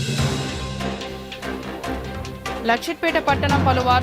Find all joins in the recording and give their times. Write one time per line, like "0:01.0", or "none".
0:00.9